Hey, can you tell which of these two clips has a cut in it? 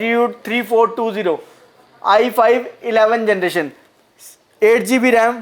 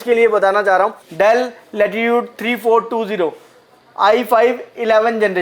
second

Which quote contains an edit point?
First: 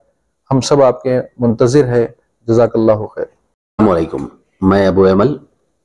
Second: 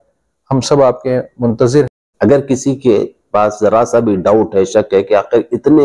second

